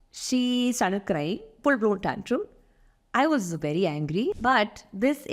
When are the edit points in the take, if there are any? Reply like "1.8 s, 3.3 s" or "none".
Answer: 1.5 s, 4.4 s